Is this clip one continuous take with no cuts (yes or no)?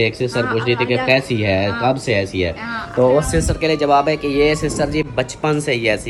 yes